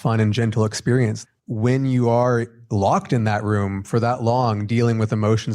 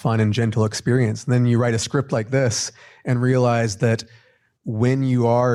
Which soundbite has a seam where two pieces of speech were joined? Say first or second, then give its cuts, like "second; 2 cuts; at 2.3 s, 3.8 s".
first; 2 cuts; at 1.2 s, 2.6 s